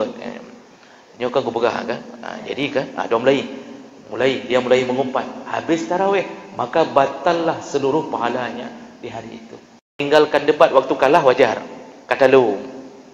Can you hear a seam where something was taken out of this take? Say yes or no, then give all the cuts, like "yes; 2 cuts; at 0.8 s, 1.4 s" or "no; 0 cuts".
yes; 1 cut; at 10.0 s